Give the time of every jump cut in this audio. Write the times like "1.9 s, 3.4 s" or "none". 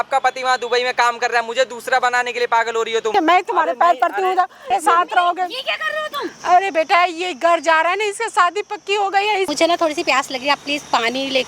3.1 s, 4.7 s, 6.3 s, 9.5 s